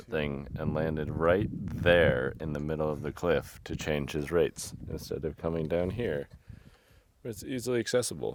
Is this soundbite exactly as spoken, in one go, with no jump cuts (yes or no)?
yes